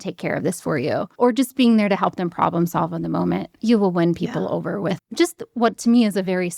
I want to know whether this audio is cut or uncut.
cut